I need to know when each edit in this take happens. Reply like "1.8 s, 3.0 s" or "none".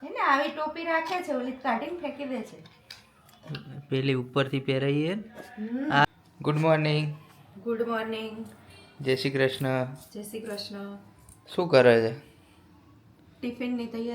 6.0 s